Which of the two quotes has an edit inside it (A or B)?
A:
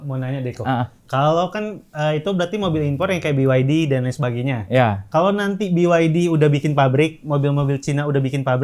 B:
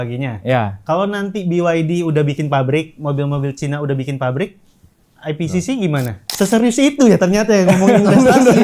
B